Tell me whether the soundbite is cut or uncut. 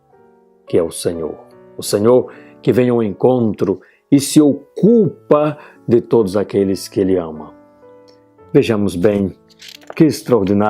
cut